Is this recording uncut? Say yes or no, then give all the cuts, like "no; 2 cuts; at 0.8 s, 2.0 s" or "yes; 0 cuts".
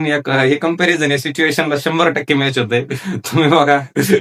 yes; 0 cuts